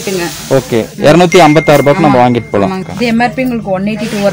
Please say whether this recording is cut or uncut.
cut